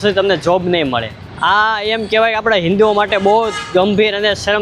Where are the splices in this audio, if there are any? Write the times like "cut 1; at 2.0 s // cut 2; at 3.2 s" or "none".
cut 1; at 1.2 s